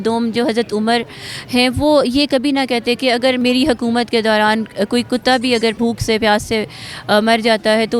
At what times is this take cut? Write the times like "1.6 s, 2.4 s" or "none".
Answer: 3.4 s, 5.8 s